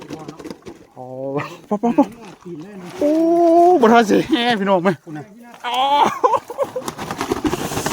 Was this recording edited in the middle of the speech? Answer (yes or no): yes